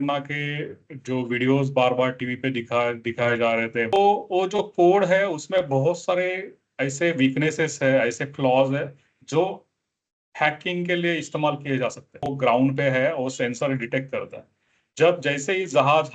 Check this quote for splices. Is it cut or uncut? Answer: cut